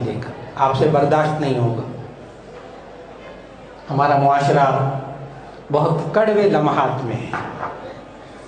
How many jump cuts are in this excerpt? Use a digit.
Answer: 0